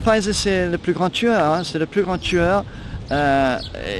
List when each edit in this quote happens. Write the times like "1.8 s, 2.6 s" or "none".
none